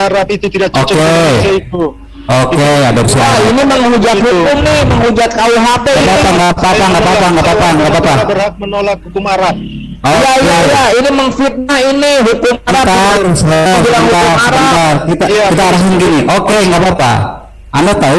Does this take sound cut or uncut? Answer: uncut